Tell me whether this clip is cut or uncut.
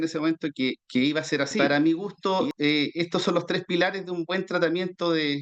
cut